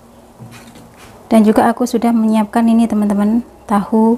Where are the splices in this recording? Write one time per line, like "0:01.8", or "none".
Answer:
0:01.0